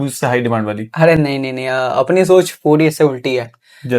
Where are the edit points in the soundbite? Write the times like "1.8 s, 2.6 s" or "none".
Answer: none